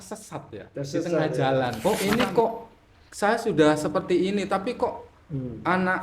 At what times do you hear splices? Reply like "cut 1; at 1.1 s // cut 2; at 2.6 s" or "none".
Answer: cut 1; at 1.8 s